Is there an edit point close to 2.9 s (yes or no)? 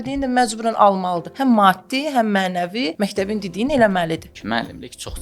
yes